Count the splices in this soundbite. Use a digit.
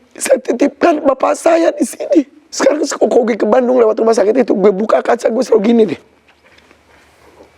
1